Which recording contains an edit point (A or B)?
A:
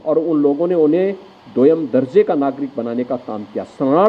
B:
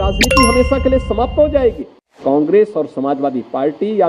B